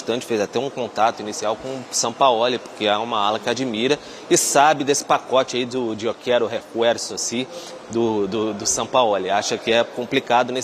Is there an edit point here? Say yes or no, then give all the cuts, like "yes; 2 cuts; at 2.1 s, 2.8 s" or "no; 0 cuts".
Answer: no; 0 cuts